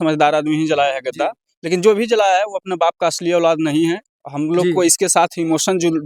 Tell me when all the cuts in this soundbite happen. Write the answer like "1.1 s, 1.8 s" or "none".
none